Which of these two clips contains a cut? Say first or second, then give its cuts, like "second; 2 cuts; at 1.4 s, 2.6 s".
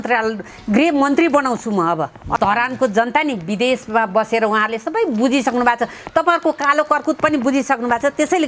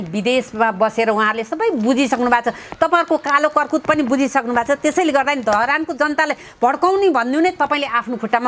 first; 1 cut; at 2.2 s